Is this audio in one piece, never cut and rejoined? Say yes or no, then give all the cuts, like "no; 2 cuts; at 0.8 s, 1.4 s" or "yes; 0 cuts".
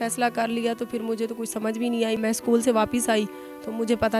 no; 1 cut; at 2.2 s